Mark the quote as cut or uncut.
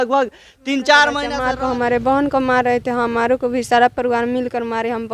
cut